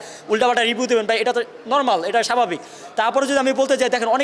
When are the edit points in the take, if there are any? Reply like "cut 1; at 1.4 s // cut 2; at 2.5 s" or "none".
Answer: none